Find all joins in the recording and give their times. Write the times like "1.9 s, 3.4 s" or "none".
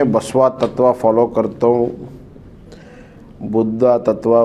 none